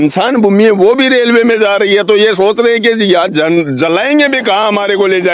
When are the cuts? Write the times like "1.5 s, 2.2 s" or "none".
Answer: none